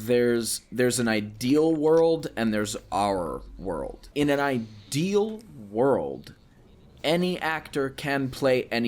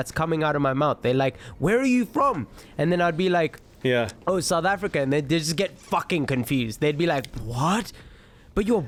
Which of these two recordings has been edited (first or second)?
first